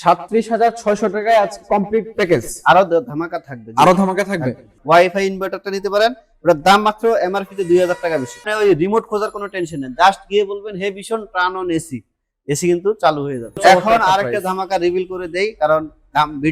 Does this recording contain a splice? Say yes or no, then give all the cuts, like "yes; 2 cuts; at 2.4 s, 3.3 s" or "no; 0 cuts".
yes; 3 cuts; at 4.7 s, 8.5 s, 13.6 s